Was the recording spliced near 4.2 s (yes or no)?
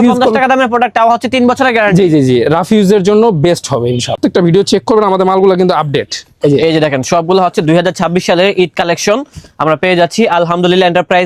yes